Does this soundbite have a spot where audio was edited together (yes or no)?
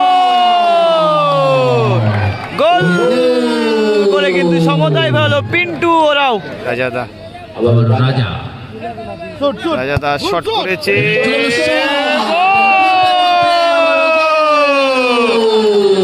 yes